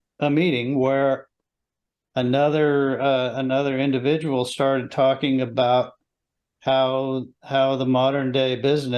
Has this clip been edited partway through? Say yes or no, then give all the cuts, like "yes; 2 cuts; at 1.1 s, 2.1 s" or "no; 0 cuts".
no; 0 cuts